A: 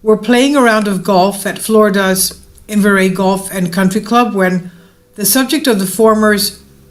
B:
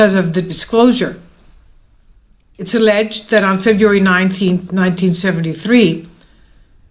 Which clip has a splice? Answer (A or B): B